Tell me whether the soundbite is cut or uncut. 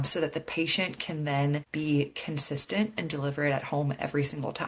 cut